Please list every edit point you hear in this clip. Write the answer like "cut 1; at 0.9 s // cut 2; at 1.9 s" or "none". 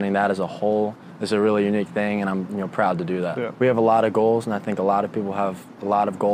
cut 1; at 3.5 s